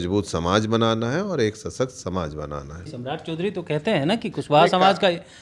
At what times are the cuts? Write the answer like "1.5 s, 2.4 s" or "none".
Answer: 2.9 s